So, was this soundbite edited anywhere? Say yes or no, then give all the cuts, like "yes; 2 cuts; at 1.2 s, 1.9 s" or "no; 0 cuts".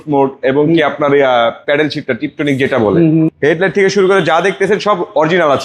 yes; 1 cut; at 3.3 s